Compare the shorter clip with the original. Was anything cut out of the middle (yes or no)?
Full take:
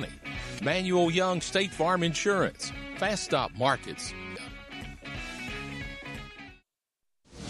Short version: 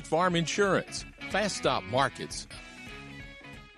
yes